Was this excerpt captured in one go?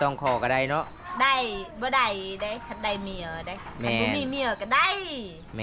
yes; 0 cuts

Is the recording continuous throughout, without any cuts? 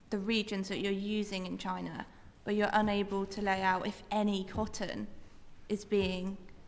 yes; 0 cuts

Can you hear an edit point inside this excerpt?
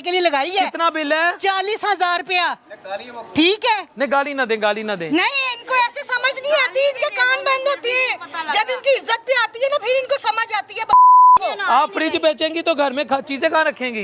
no; 0 cuts

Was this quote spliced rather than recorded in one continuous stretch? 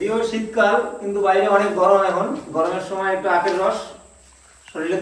no; 0 cuts

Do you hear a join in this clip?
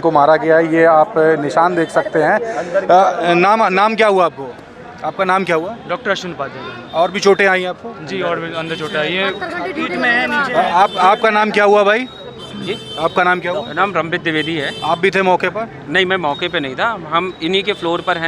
no; 0 cuts

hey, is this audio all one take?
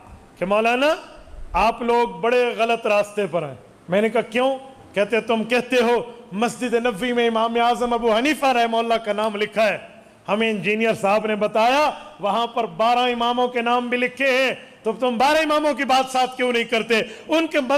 yes; 0 cuts

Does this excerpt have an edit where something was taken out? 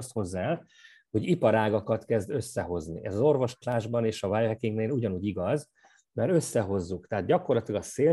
no; 0 cuts

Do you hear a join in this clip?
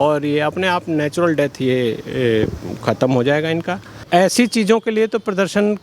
yes; 1 cut; at 4.1 s

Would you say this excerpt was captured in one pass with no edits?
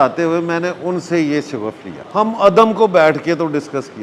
no; 1 cut; at 1.9 s

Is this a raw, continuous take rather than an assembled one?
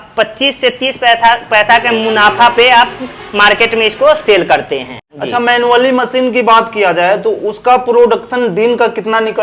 no; 1 cut; at 5.0 s

